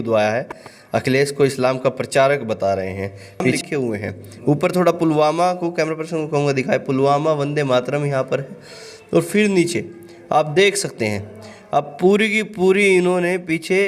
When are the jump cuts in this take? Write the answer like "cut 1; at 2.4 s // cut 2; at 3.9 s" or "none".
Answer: cut 1; at 3.6 s